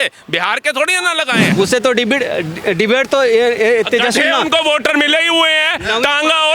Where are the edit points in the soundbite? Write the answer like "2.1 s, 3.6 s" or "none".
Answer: 1.5 s